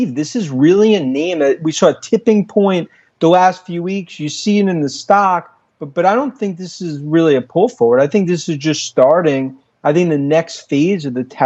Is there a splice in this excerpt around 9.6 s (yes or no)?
no